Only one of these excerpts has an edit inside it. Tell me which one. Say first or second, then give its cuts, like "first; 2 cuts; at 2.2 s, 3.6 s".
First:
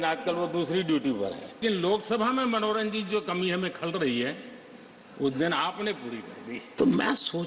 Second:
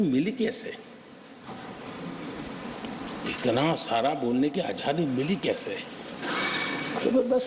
first; 2 cuts; at 1.6 s, 6.7 s